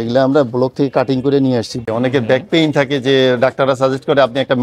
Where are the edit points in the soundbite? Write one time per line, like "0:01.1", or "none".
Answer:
0:01.8